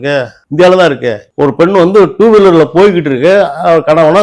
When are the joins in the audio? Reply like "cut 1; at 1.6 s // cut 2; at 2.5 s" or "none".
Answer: cut 1; at 1.3 s